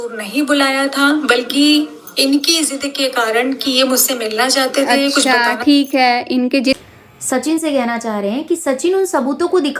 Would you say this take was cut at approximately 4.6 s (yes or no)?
no